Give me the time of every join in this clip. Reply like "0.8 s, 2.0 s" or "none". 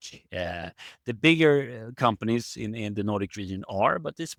none